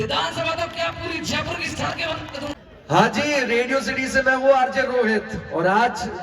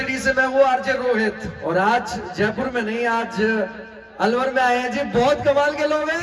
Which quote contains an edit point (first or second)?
first